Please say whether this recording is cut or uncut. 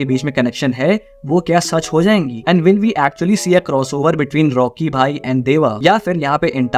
uncut